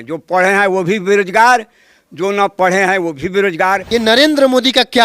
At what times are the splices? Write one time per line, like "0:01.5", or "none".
0:03.8